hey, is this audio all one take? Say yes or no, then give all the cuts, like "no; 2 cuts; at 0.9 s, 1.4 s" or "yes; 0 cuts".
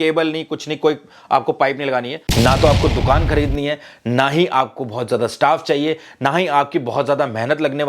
no; 1 cut; at 2.2 s